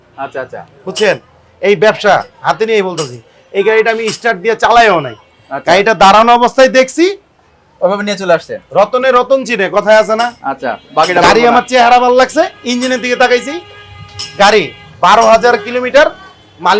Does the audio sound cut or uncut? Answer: uncut